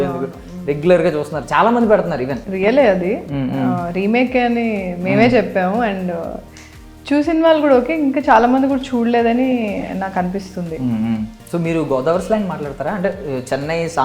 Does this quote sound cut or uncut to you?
cut